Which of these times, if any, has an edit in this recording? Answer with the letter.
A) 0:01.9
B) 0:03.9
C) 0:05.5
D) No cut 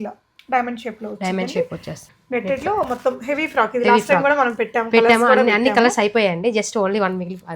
A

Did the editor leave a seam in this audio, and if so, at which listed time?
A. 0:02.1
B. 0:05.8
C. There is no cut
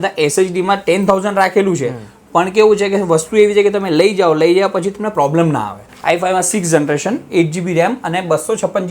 B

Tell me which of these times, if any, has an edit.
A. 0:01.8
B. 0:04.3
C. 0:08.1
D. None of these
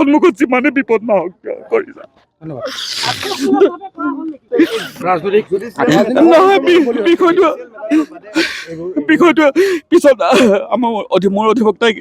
B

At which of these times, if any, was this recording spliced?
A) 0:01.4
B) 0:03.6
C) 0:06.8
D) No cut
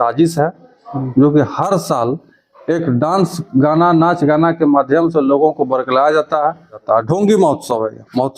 C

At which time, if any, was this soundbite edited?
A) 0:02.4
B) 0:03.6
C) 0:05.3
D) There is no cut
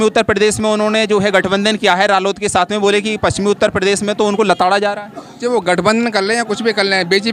D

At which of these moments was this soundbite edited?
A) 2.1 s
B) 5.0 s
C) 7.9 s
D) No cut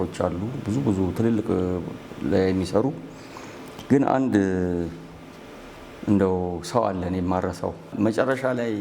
C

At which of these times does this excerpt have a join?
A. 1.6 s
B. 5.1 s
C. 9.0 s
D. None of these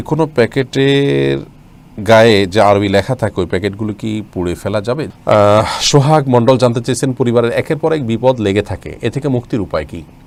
D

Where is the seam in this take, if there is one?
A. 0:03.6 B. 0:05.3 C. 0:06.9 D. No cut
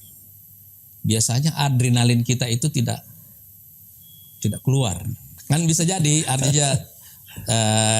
B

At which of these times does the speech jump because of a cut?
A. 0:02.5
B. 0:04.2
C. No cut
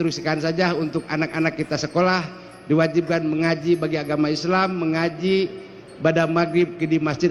C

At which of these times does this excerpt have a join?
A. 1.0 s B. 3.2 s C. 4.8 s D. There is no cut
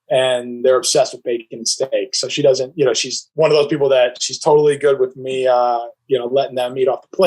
B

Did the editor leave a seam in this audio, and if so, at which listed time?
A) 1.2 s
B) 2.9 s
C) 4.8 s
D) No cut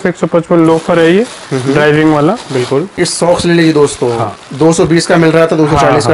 B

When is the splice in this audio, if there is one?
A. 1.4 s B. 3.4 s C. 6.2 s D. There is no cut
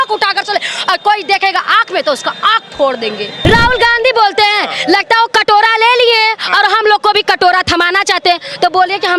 B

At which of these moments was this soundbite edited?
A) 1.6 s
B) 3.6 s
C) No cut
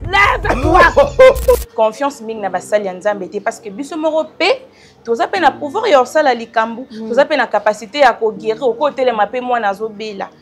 A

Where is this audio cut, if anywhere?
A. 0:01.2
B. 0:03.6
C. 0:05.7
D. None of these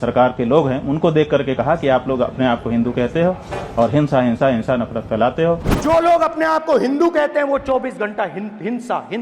C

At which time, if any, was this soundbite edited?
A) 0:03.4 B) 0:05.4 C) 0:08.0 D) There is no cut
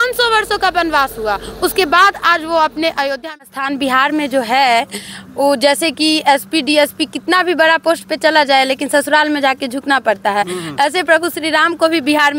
A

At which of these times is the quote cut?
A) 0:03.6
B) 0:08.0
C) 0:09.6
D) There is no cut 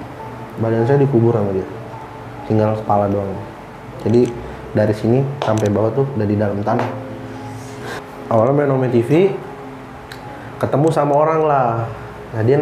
B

